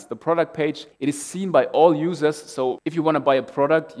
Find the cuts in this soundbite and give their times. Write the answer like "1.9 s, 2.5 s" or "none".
0.9 s, 2.8 s